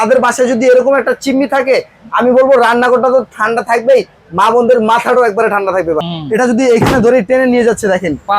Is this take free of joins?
no; 1 cut; at 6.0 s

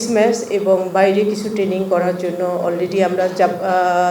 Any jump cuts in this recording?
no; 0 cuts

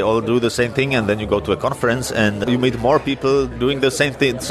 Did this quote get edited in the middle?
yes; 1 cut; at 2.5 s

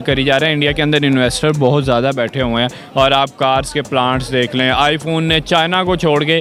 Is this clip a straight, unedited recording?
yes; 0 cuts

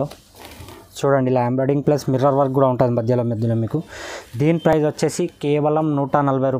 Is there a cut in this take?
no; 0 cuts

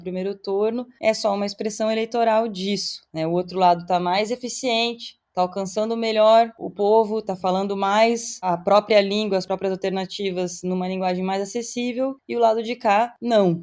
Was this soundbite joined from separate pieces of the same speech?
yes; 2 cuts; at 6.6 s, 9.5 s

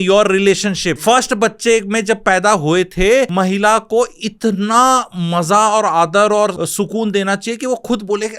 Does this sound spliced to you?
yes; 3 cuts; at 1.0 s, 3.3 s, 6.5 s

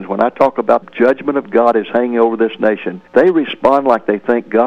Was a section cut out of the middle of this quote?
yes; 1 cut; at 2.9 s

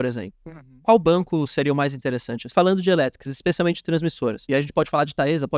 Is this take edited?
yes; 2 cuts; at 2.5 s, 4.4 s

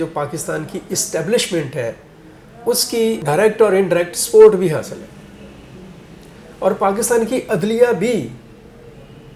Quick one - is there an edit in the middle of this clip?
no; 0 cuts

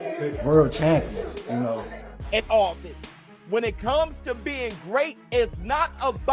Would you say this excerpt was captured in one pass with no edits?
no; 1 cut; at 2.1 s

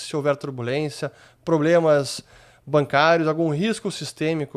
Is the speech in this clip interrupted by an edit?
no; 0 cuts

